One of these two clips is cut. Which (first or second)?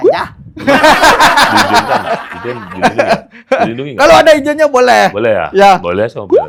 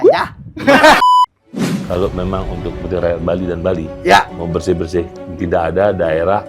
second